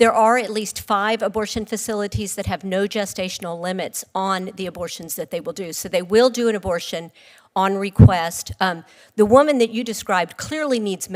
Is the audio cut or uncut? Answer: uncut